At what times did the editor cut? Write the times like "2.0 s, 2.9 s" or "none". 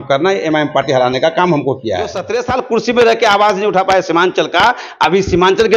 2.2 s